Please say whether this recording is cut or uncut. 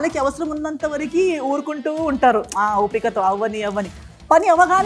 uncut